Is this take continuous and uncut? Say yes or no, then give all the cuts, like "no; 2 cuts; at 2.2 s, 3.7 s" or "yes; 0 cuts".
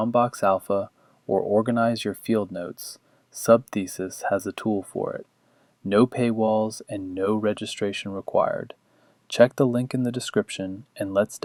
yes; 0 cuts